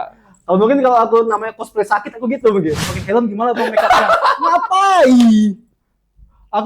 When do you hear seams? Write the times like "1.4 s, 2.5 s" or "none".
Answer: 2.8 s